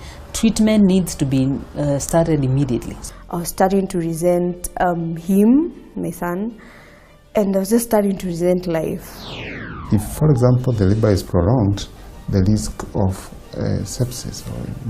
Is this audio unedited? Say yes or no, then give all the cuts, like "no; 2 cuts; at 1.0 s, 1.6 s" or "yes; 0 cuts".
no; 2 cuts; at 2.9 s, 9.4 s